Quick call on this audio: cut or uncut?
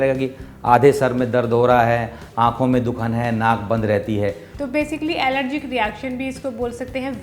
cut